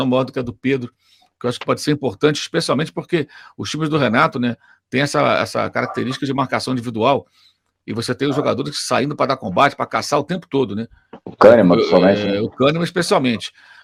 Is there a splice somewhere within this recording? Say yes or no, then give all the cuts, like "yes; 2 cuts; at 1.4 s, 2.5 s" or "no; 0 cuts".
no; 0 cuts